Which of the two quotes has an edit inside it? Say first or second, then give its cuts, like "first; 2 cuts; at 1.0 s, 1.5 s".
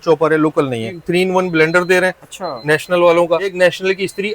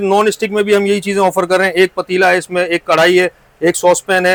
first; 2 cuts; at 1.0 s, 3.5 s